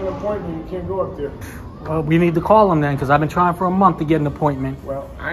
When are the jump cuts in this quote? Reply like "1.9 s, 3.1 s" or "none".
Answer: none